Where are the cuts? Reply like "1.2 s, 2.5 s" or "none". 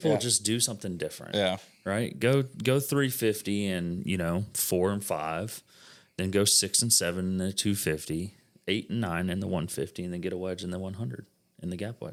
none